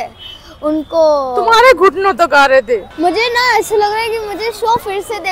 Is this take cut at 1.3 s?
no; 1 cut; at 2.9 s

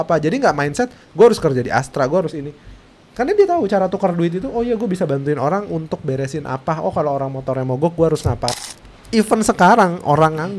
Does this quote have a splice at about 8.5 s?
yes; 1 cut; at 8.5 s

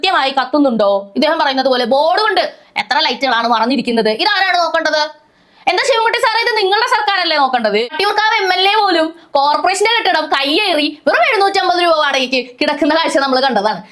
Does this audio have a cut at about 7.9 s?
yes; 1 cut; at 7.9 s

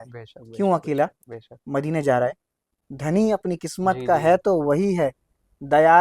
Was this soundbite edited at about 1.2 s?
no; 1 cut; at 2.6 s

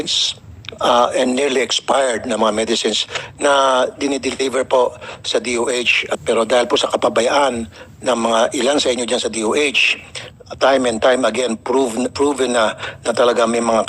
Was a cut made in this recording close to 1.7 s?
no; 1 cut; at 6.0 s

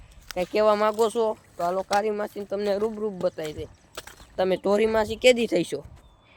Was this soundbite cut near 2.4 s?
no; 0 cuts

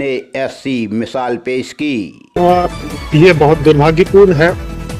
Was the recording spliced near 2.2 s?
yes; 1 cut; at 2.2 s

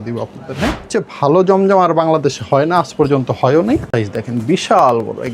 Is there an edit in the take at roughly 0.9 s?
yes; 2 cuts; at 0.9 s, 3.9 s

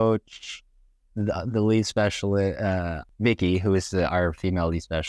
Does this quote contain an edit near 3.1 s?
yes; 1 cut; at 3.1 s

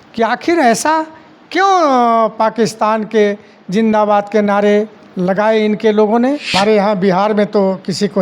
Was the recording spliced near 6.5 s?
yes; 1 cut; at 6.5 s

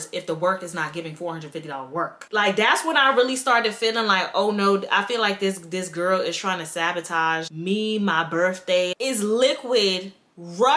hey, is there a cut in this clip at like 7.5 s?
yes; 3 cuts; at 2.2 s, 7.5 s, 8.9 s

